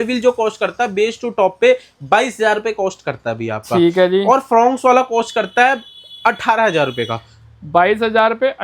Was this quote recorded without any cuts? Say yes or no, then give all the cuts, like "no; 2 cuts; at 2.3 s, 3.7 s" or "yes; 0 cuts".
yes; 0 cuts